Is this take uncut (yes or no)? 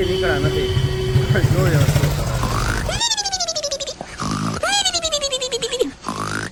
yes